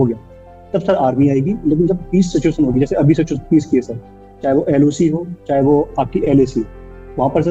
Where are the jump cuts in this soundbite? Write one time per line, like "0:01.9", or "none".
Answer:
none